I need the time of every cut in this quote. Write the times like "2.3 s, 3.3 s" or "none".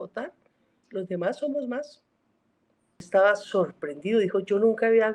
3.0 s